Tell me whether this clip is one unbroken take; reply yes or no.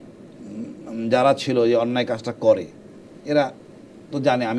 yes